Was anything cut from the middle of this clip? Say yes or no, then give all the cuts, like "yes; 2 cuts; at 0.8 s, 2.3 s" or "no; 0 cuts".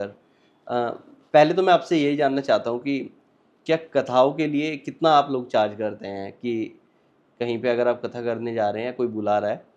no; 0 cuts